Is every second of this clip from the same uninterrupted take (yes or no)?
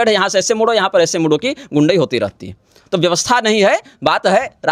yes